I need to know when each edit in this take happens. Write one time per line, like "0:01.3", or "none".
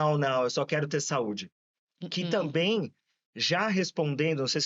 none